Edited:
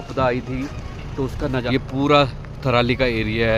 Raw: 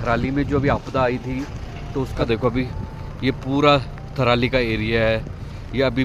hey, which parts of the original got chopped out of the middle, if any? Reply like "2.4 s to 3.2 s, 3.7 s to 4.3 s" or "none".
2.2 s to 2.9 s